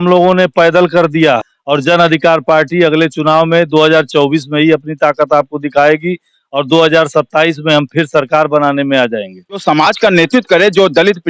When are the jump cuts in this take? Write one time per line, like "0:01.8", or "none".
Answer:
0:01.5
0:09.6